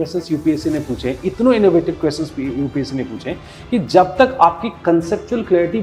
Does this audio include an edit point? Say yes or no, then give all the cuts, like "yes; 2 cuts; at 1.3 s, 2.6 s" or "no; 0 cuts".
no; 0 cuts